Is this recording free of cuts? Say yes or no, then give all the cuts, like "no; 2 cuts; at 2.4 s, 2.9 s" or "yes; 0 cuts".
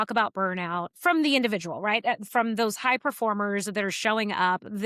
yes; 0 cuts